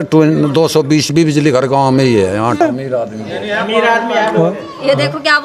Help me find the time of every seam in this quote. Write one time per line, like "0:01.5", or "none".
0:02.6